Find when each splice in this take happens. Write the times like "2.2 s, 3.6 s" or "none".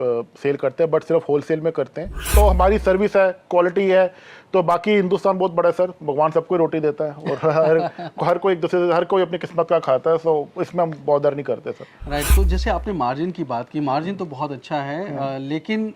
2.3 s, 12.3 s